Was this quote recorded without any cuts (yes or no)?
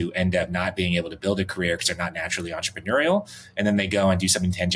yes